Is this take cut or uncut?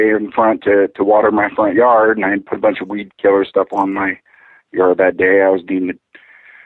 cut